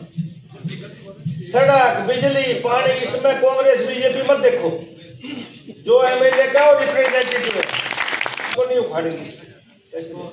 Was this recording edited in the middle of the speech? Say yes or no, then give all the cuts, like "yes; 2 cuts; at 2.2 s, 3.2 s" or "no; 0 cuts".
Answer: yes; 1 cut; at 8.5 s